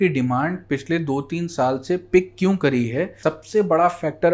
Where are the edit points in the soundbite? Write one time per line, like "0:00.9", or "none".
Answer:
0:03.1